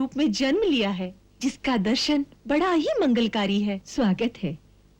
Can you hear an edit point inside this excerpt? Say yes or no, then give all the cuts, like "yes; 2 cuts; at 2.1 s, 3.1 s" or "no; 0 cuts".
yes; 1 cut; at 3.9 s